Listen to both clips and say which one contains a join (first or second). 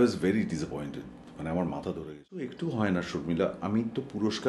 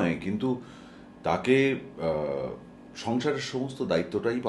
first